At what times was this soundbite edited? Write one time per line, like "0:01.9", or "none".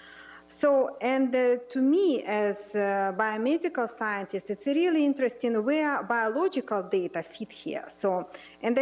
none